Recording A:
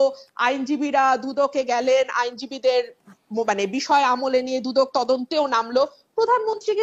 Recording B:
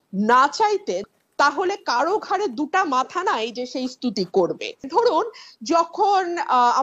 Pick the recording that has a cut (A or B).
B